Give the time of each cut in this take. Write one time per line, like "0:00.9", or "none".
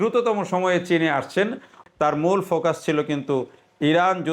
0:01.8